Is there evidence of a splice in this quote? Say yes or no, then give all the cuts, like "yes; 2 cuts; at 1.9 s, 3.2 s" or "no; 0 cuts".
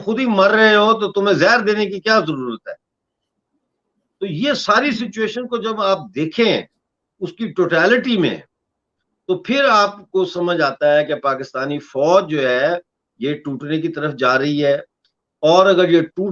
no; 0 cuts